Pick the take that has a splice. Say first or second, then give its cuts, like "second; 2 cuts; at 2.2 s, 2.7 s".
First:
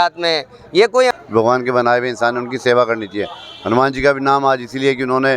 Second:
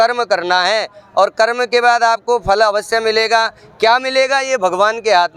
first; 1 cut; at 1.1 s